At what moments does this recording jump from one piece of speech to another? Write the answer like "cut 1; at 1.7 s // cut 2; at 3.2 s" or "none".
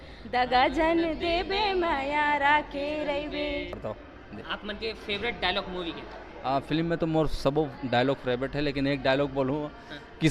cut 1; at 3.9 s